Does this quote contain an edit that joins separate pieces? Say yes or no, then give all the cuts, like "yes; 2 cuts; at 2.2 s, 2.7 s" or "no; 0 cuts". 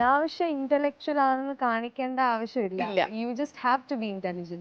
no; 0 cuts